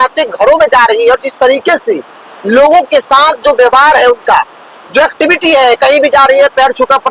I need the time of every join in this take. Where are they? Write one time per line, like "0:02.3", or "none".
none